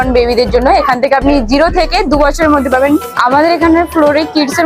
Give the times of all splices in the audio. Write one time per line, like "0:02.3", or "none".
0:03.1